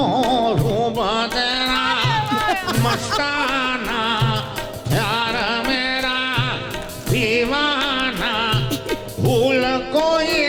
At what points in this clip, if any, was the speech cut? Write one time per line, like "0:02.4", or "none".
none